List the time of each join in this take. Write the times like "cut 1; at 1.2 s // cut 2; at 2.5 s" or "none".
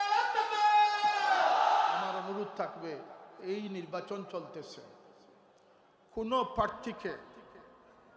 cut 1; at 2.0 s